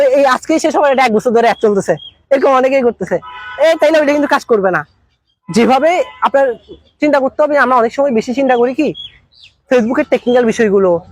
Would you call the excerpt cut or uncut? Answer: uncut